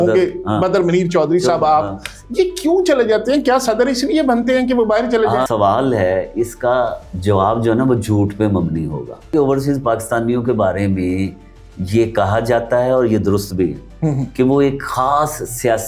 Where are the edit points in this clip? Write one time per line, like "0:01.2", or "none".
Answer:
0:05.5
0:09.3